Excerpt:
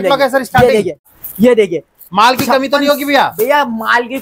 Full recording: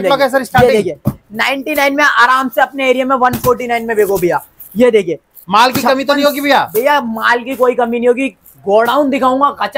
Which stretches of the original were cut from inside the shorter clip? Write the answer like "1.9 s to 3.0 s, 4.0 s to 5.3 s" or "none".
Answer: 1.2 s to 4.5 s